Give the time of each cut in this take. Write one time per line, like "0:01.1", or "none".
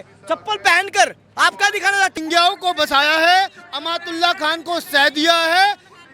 0:02.2